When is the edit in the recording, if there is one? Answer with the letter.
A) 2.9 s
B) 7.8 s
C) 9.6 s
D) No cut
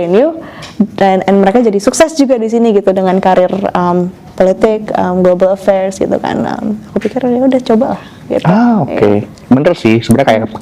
D